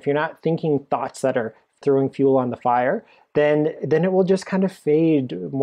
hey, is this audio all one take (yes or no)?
no